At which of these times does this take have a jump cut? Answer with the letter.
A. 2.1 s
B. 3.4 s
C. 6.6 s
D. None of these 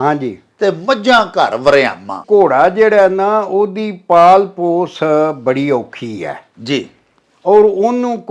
A